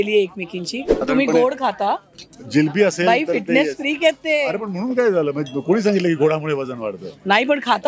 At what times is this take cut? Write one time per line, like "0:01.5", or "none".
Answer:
0:01.0

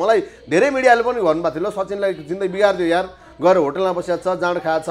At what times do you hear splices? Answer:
none

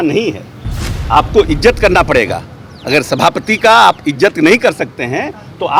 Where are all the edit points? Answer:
none

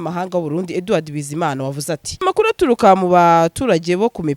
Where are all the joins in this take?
0:02.2

